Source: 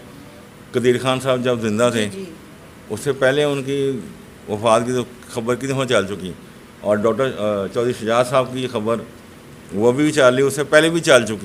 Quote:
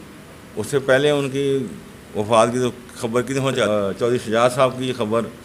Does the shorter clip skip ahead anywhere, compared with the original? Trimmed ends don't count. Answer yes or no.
yes